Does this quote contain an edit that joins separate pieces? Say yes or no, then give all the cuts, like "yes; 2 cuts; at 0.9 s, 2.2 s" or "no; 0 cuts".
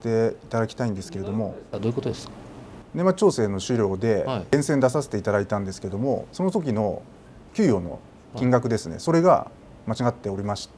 yes; 2 cuts; at 1.6 s, 6.3 s